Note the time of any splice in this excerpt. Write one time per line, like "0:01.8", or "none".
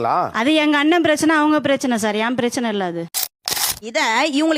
0:03.6